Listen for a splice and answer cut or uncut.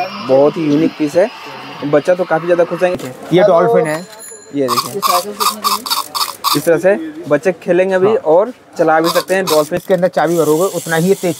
cut